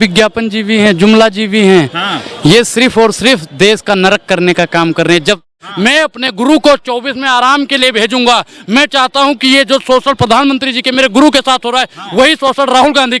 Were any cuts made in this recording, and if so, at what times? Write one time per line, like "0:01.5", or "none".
0:05.4